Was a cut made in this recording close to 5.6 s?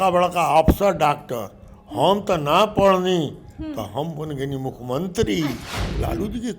yes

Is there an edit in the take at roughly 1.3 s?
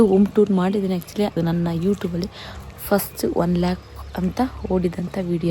yes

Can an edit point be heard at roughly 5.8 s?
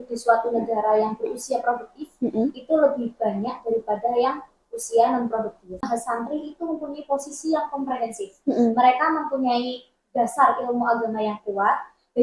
yes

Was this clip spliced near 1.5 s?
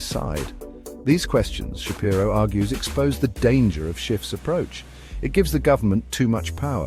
no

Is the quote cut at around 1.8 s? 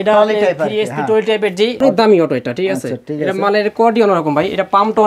yes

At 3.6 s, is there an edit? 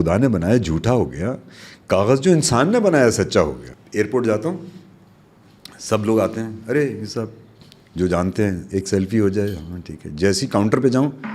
yes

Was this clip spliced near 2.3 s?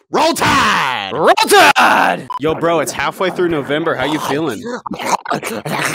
yes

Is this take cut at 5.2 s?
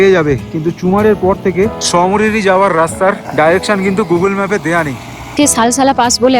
yes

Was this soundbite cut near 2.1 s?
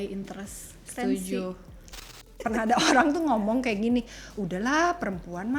yes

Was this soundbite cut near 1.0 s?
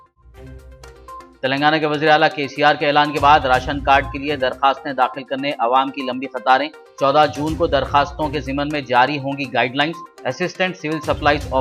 yes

